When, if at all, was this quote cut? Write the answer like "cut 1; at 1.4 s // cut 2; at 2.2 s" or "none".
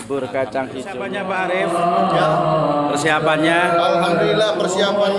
cut 1; at 1.2 s